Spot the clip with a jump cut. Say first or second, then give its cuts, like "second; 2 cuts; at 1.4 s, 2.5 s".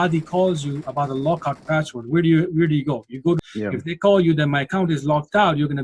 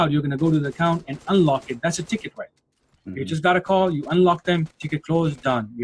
first; 1 cut; at 3.4 s